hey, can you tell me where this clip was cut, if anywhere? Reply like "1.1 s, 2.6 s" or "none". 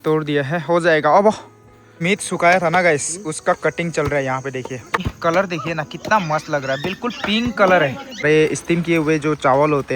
2.0 s, 5.0 s, 8.2 s